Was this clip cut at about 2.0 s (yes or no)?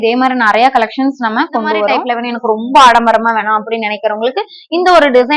yes